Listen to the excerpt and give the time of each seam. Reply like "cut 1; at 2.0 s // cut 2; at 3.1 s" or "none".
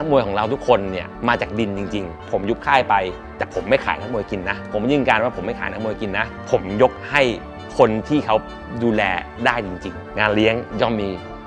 cut 1; at 1.1 s // cut 2; at 2.2 s // cut 3; at 4.7 s // cut 4; at 6.4 s // cut 5; at 10.1 s